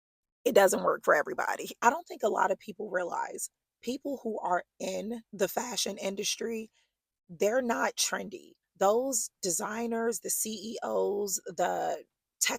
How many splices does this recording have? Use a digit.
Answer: 3